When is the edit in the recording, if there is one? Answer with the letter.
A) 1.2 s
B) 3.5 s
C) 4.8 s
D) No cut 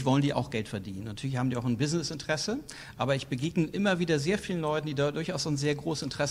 D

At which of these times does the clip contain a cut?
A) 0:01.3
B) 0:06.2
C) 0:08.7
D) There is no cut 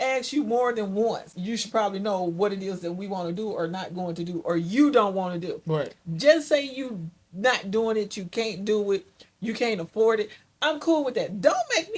A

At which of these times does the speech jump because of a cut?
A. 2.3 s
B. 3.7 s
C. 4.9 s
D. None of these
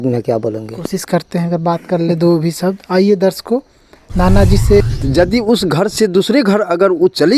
C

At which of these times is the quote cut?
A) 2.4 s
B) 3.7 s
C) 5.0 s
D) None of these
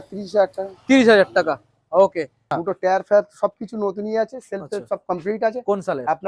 A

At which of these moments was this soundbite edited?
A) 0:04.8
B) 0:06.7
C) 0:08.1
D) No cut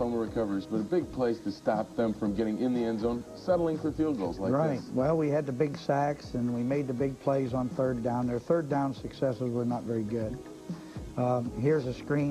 D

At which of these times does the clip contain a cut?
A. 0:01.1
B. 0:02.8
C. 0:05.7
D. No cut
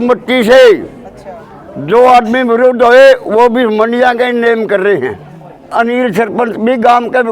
C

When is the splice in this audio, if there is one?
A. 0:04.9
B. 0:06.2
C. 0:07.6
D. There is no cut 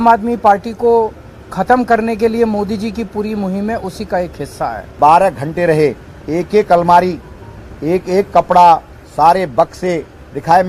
A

